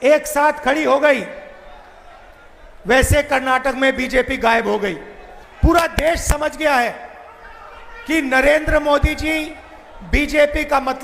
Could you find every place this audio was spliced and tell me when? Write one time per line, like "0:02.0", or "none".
0:05.5